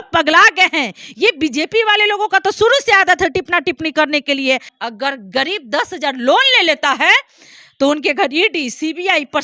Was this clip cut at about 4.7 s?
yes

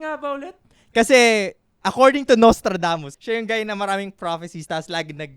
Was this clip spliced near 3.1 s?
yes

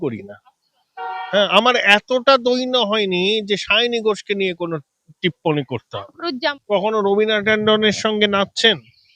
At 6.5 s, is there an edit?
yes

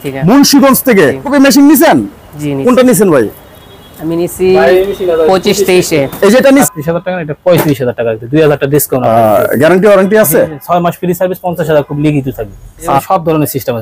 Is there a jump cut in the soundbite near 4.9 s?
no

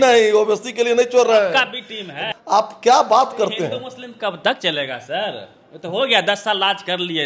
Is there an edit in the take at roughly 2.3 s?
yes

